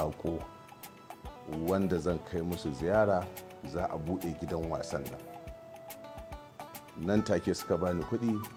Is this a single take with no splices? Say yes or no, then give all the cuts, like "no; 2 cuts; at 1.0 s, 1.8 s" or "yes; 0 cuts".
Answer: yes; 0 cuts